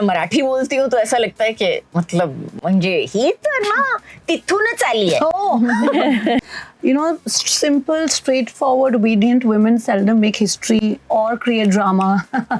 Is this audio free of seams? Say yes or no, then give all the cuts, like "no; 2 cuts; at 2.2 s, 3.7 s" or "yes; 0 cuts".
no; 1 cut; at 6.5 s